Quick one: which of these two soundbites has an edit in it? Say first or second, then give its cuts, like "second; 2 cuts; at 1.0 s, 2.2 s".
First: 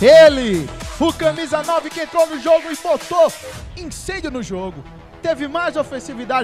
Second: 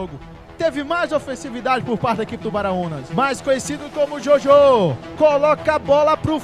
second; 2 cuts; at 3.0 s, 5.0 s